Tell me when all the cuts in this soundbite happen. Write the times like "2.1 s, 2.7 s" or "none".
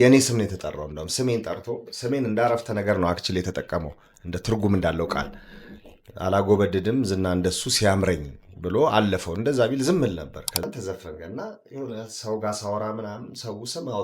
10.6 s